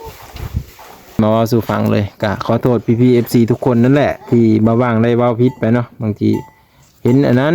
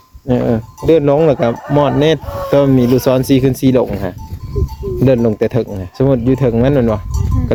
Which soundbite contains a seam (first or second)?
first